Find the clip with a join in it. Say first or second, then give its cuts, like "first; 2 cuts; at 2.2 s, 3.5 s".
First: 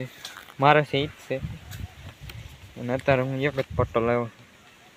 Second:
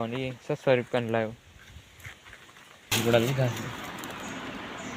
second; 1 cut; at 2.9 s